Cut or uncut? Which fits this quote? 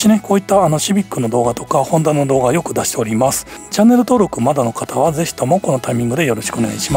cut